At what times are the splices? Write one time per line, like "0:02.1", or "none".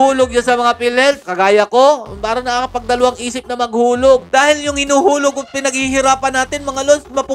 none

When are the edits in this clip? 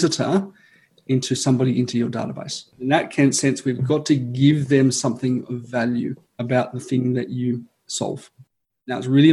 0:02.7
0:06.3

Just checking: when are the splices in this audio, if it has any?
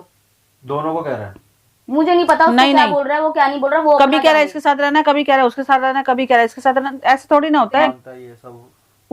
0:08.0

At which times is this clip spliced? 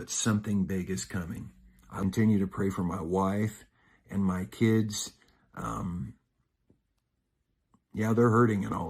0:01.8

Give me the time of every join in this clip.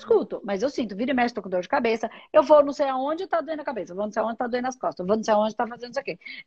none

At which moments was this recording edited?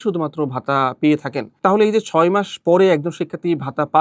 none

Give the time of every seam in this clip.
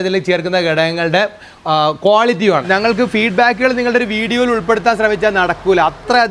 0:02.6

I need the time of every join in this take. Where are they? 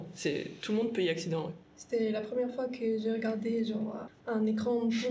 0:01.8
0:04.1

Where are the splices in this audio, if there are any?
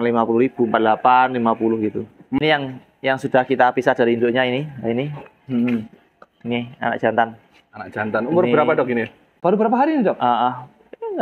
0:02.4
0:09.4

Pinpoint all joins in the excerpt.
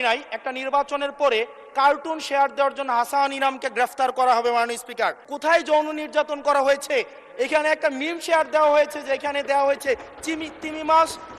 0:05.3

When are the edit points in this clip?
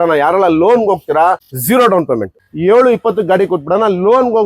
0:01.5
0:02.4

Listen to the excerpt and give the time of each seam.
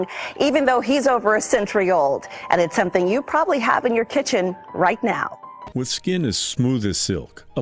0:05.6

